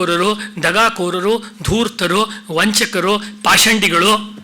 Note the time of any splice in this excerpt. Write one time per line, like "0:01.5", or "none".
none